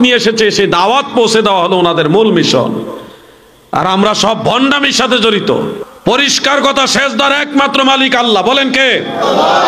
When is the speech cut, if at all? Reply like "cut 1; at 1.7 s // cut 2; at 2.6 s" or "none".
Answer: cut 1; at 5.9 s